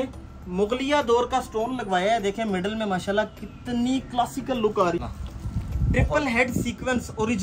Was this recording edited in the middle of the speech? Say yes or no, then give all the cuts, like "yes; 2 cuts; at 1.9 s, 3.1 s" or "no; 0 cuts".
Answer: yes; 1 cut; at 5.0 s